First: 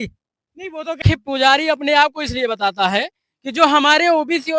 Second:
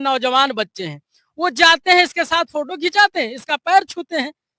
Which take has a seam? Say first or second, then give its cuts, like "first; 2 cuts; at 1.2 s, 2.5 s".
first; 1 cut; at 1.0 s